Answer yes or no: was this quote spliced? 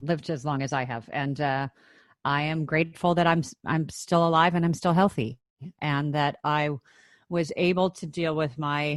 no